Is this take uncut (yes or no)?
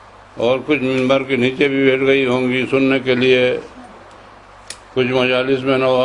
no